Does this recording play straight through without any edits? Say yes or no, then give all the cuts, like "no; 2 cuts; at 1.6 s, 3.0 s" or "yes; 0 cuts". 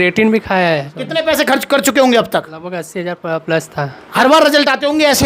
no; 2 cuts; at 0.9 s, 4.1 s